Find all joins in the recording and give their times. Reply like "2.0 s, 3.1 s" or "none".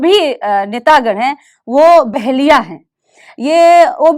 none